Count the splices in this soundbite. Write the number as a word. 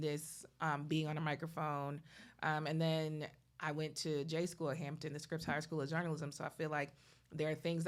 zero